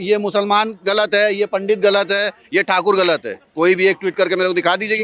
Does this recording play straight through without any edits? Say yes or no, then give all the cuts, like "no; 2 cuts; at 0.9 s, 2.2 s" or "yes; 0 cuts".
yes; 0 cuts